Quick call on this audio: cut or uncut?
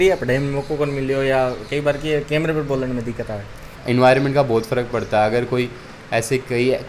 uncut